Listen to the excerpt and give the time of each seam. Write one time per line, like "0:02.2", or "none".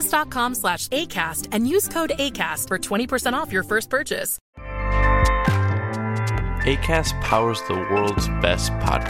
0:04.3
0:05.9